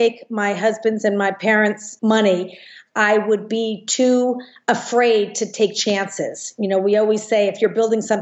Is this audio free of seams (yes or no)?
no